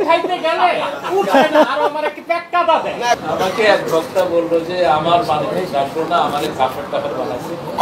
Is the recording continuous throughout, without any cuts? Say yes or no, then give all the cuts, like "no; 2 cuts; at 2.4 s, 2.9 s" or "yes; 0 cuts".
no; 1 cut; at 3.2 s